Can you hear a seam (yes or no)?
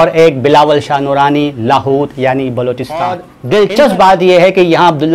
yes